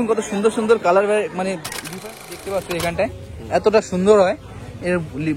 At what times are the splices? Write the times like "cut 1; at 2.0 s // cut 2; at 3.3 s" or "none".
cut 1; at 1.9 s